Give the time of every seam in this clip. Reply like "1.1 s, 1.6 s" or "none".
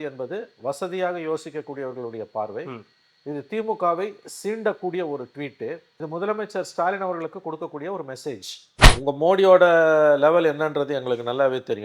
8.8 s